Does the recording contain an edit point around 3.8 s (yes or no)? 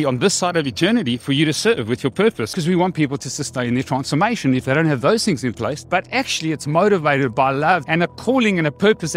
no